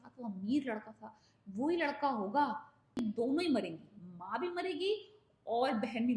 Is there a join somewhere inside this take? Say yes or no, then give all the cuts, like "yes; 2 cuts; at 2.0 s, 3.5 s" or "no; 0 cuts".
yes; 1 cut; at 3.0 s